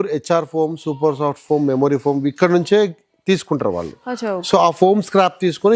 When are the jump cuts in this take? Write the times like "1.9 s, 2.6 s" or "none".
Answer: none